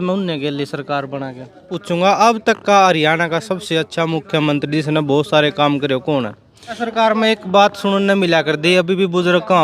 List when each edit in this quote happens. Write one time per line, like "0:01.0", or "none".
0:01.8
0:06.8